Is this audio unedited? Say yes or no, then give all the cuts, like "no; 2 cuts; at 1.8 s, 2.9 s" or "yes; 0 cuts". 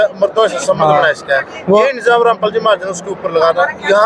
yes; 0 cuts